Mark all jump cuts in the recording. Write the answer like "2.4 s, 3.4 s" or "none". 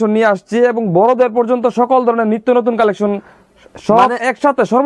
none